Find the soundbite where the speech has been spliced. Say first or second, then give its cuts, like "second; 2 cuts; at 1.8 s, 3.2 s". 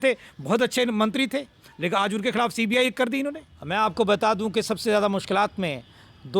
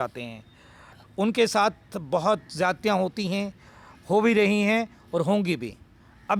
first; 1 cut; at 3.5 s